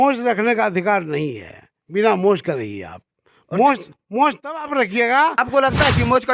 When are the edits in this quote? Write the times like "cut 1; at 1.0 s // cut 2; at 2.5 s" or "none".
cut 1; at 5.4 s